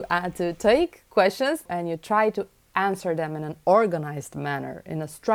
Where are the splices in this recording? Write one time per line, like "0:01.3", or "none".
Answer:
0:01.6